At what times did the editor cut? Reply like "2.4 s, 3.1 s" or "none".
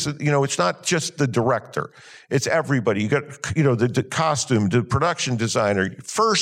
none